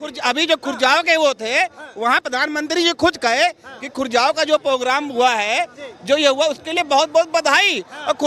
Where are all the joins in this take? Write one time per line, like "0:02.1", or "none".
none